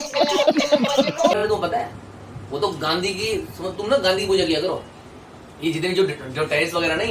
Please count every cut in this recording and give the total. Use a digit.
0